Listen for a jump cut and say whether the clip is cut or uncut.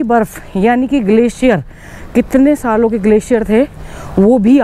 uncut